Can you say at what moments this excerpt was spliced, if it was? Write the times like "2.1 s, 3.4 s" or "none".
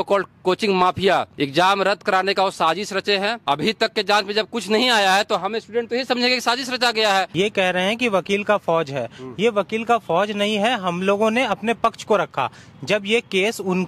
1.3 s, 3.4 s, 7.3 s